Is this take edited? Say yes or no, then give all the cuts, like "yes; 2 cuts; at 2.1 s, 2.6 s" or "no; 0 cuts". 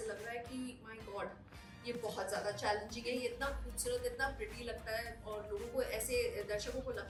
no; 0 cuts